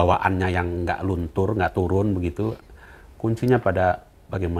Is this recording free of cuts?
yes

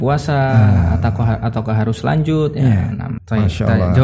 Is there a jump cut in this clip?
yes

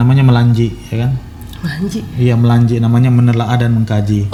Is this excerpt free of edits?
yes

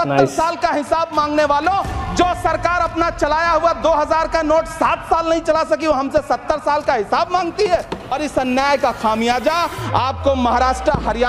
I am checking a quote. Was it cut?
yes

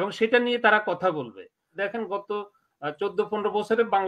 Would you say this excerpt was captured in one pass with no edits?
no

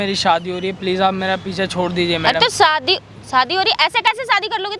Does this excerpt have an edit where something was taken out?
no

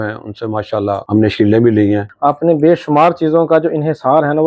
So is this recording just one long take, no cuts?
no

